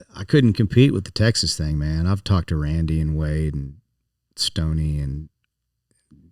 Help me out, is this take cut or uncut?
uncut